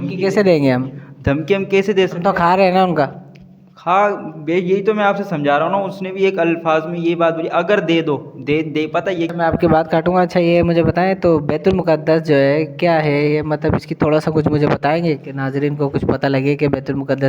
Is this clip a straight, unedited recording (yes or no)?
no